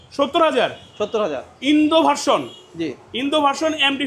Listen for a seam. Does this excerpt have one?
no; 0 cuts

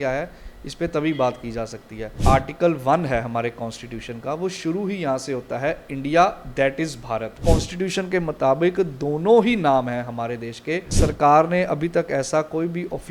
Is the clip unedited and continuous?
no; 3 cuts; at 2.2 s, 7.4 s, 10.9 s

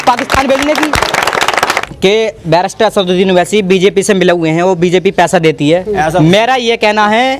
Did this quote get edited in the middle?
yes; 1 cut; at 1.8 s

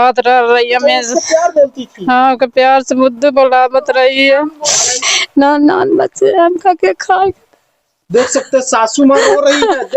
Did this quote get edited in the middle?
yes; 1 cut; at 5.1 s

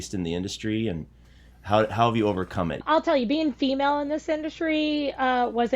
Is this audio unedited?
no; 1 cut; at 2.8 s

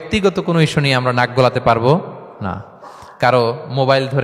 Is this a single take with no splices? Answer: yes; 0 cuts

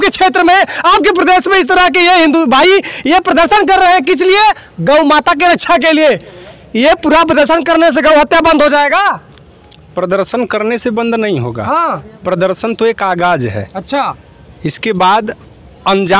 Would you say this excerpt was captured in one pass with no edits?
yes; 0 cuts

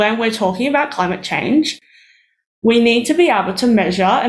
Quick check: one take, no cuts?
yes; 0 cuts

